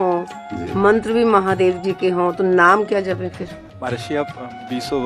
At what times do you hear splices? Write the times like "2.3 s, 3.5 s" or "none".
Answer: 3.6 s